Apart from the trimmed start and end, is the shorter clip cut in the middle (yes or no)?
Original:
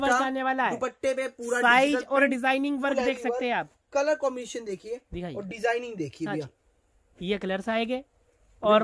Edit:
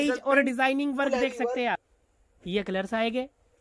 yes